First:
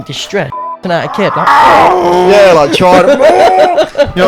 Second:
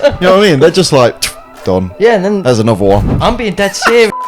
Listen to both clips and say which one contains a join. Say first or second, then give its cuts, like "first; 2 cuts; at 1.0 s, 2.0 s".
second; 1 cut; at 3.0 s